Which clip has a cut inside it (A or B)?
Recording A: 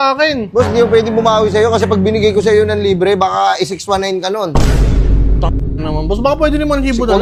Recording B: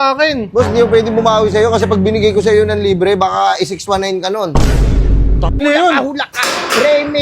B